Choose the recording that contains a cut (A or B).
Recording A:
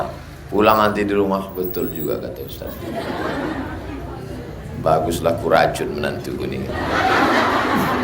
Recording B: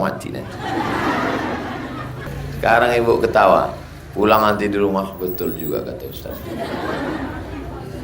B